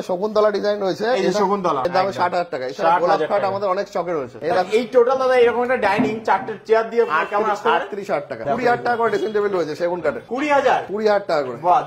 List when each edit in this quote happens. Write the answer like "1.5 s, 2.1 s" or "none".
4.4 s, 8.4 s